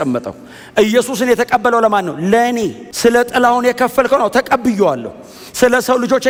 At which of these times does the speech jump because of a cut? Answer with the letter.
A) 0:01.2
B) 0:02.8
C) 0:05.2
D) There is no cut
D